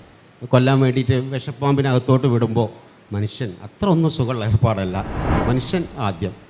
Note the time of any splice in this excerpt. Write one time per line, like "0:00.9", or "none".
0:05.3